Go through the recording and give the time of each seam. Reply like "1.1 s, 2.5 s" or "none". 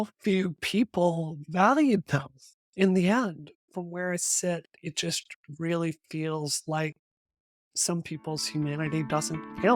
3.6 s

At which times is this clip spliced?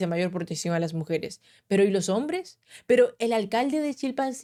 none

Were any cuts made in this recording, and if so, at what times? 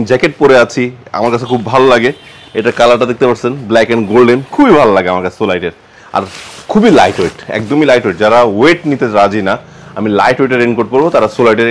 none

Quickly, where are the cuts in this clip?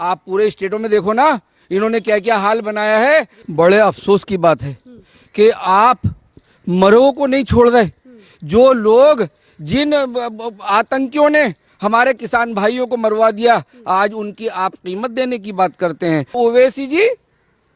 3.4 s, 16.3 s

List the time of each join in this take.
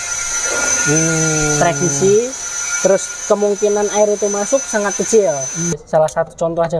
5.8 s

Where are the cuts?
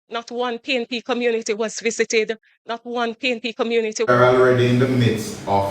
4.1 s

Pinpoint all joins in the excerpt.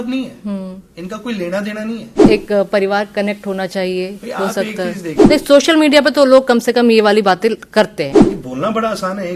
2.2 s, 5.3 s, 8.2 s

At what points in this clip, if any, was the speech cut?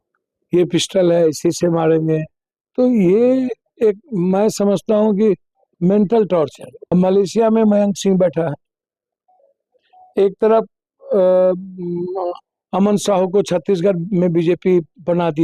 6.9 s

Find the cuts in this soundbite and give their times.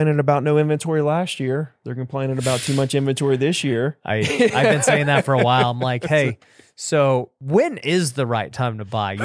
7.4 s

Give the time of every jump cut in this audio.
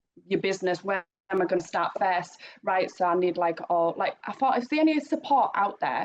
none

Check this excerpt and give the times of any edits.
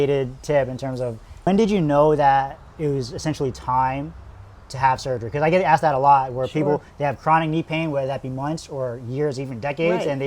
1.5 s

